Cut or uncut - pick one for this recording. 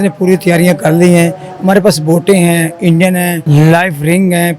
cut